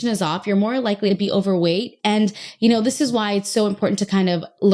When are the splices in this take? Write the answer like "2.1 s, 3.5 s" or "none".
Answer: 1.1 s